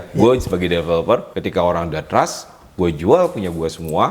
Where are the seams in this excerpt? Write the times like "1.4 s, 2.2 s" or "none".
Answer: 1.4 s